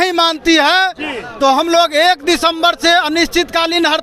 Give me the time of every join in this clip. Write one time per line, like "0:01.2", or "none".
none